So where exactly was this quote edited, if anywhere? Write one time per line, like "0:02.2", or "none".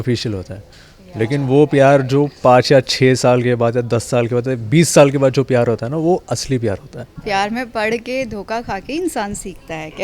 0:07.1

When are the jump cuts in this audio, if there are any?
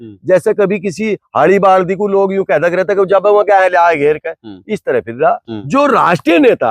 0:05.5

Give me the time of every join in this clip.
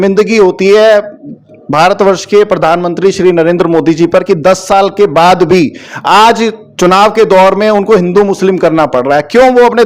none

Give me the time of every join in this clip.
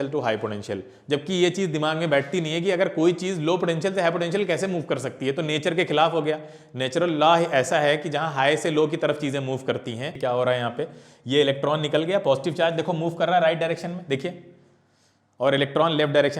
0:10.0

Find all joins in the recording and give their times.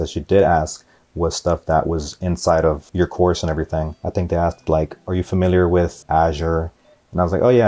0:02.8
0:04.0
0:05.0
0:06.0

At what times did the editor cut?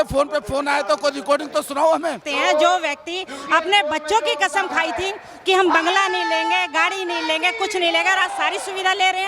0:02.2

